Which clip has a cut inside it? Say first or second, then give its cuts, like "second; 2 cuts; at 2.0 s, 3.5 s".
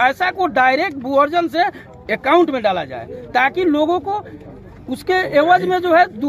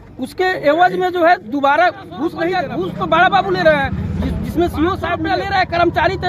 second; 2 cuts; at 2.5 s, 5.2 s